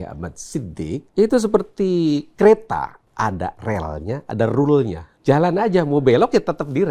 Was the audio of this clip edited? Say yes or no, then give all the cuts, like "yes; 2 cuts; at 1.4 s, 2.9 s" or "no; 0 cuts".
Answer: yes; 3 cuts; at 1.1 s, 3.1 s, 5.1 s